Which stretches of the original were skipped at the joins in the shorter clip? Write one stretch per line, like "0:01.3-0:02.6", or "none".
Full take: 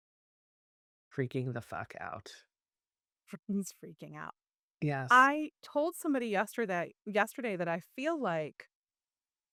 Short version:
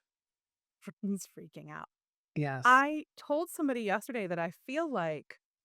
0:06.5-0:07.3

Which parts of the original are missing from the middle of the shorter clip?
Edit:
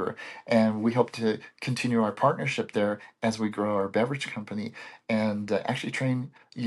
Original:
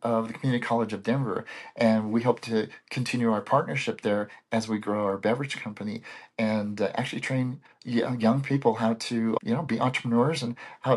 none

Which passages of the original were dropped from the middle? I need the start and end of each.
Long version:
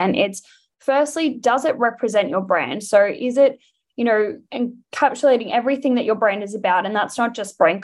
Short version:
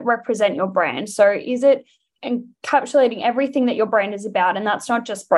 0:03.8-0:04.4

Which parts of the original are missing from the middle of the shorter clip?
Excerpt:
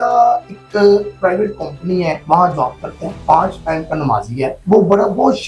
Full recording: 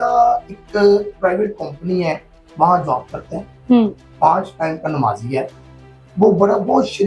0:02.2-0:02.5
0:03.4-0:04.0
0:05.5-0:06.1

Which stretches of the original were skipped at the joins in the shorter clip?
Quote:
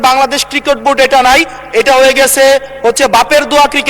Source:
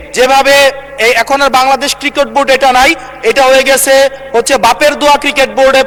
none

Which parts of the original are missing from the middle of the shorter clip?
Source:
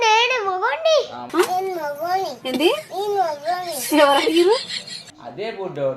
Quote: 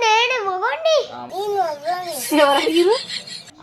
0:01.2-0:02.9

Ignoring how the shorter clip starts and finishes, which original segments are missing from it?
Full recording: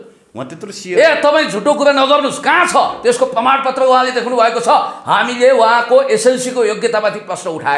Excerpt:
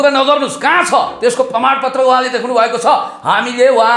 none

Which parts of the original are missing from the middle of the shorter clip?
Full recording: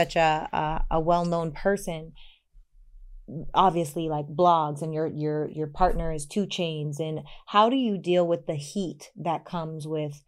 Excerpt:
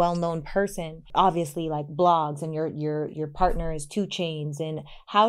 0:02.1-0:03.4

